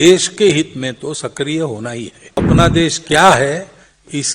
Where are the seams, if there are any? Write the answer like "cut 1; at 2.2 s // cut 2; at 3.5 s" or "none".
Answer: cut 1; at 2.4 s